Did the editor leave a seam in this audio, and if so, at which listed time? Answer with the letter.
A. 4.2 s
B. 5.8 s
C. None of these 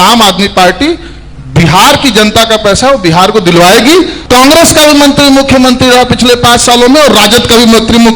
A